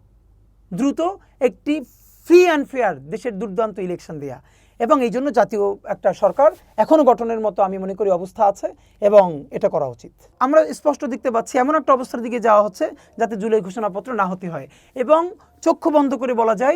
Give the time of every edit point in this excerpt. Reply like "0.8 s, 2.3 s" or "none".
10.3 s